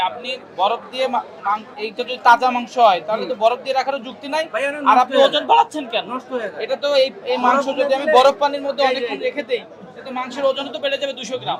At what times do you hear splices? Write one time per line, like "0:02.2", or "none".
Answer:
none